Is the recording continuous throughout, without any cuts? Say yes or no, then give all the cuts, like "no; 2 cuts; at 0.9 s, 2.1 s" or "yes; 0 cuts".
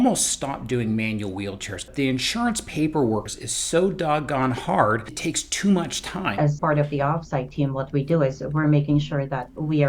no; 4 cuts; at 1.9 s, 3.3 s, 5.1 s, 6.4 s